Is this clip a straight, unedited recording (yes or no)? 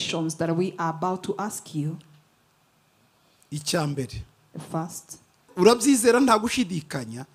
no